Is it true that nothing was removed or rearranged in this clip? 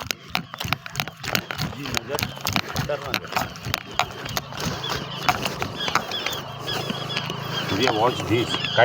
yes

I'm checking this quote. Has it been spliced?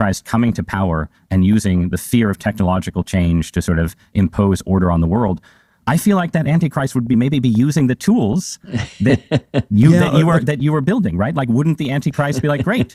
no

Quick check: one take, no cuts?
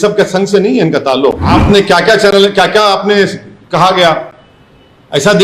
no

